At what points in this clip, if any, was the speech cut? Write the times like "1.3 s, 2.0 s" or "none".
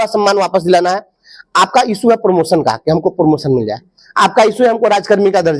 none

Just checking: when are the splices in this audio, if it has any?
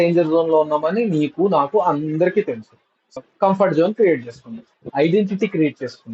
3.0 s, 4.9 s

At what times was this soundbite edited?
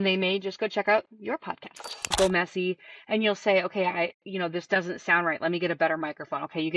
2.1 s

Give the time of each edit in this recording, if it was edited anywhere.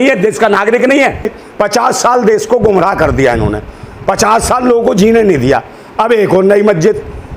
1.4 s

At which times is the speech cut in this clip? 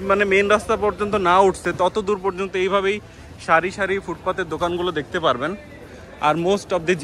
none

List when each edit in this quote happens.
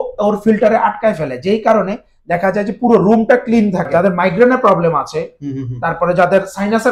3.9 s

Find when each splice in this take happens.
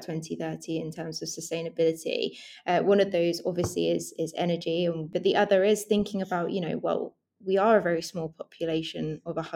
5.1 s

